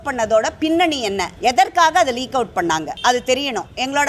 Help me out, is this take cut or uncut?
cut